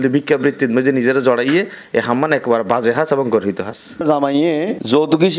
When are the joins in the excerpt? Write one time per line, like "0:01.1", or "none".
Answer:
0:04.0

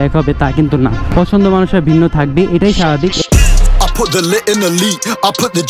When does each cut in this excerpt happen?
0:01.0
0:03.2

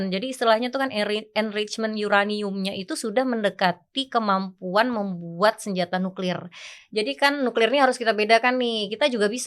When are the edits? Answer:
none

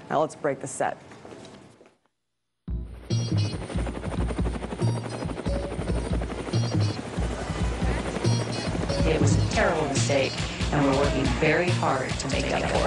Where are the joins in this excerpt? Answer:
0:06.2

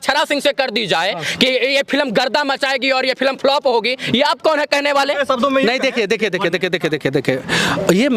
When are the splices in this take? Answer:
none

